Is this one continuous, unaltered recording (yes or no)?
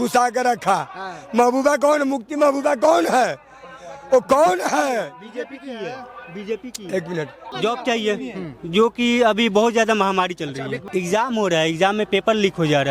no